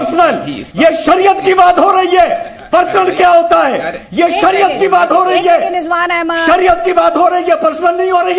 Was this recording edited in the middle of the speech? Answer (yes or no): no